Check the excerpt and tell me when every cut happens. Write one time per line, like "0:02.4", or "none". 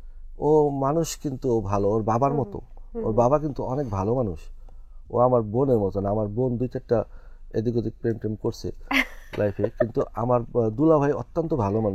none